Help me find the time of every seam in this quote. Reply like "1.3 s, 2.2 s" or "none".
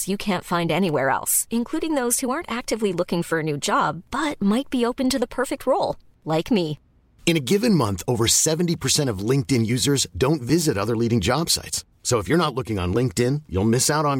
none